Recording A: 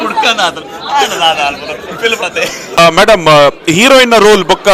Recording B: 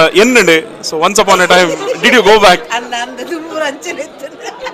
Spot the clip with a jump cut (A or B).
A